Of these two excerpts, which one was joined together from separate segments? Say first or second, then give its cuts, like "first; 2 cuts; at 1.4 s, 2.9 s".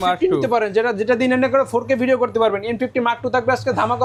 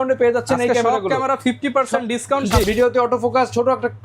second; 1 cut; at 2.6 s